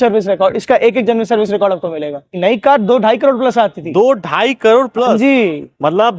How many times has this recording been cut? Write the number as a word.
one